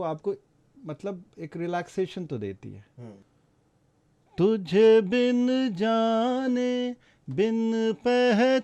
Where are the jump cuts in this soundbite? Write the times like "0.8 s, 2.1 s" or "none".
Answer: 3.2 s